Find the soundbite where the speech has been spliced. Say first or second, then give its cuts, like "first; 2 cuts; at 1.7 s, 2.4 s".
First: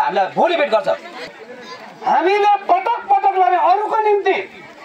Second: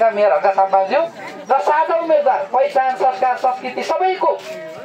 first; 1 cut; at 1.4 s